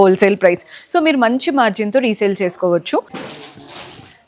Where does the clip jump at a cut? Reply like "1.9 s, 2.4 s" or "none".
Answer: 3.2 s